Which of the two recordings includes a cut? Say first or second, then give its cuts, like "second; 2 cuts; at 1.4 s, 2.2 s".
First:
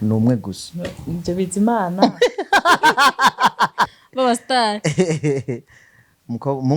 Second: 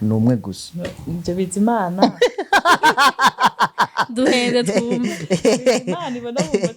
first; 1 cut; at 4.0 s